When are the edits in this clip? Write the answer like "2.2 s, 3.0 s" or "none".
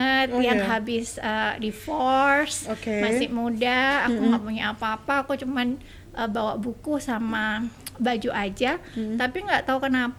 none